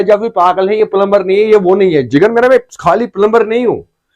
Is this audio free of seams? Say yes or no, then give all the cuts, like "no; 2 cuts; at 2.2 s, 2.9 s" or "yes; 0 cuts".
yes; 0 cuts